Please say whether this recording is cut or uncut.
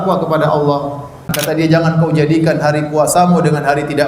cut